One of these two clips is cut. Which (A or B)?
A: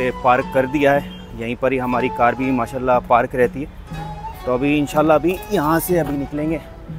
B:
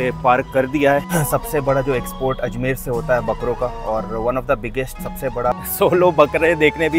B